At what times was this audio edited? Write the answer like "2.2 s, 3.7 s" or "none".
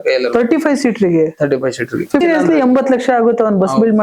2.2 s